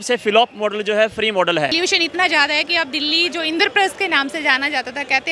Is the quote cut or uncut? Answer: cut